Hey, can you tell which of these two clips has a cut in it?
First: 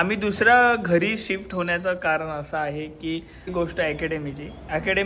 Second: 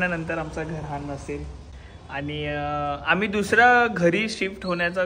first; 1 cut; at 3.5 s

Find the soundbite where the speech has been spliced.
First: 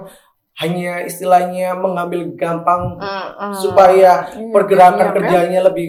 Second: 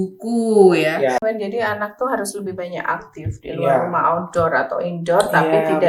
second; 1 cut; at 1.2 s

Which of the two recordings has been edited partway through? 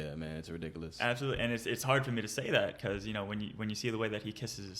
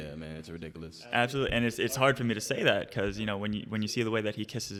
first; 1 cut; at 0.9 s

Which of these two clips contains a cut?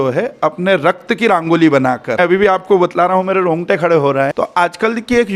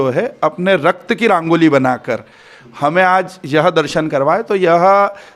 first; 2 cuts; at 2.2 s, 4.3 s

